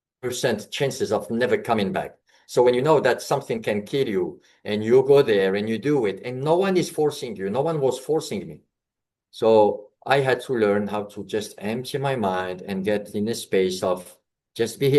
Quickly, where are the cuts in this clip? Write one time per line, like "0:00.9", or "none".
none